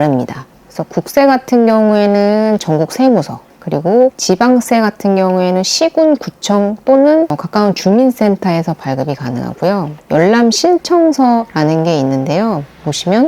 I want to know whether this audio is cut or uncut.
cut